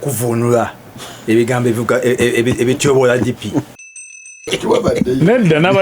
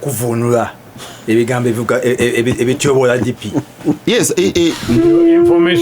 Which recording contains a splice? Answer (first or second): first